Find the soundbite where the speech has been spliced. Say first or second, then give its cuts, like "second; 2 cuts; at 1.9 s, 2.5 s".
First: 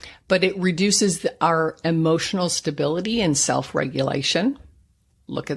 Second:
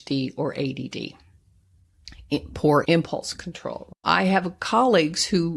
second; 1 cut; at 4.0 s